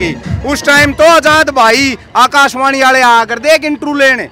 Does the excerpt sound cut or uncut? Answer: uncut